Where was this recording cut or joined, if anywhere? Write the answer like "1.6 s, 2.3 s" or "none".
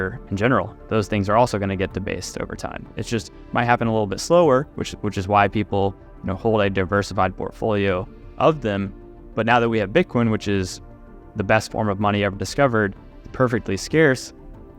none